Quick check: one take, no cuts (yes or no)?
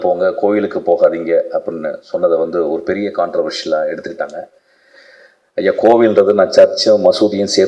yes